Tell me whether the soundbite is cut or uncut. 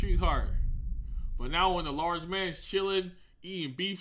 uncut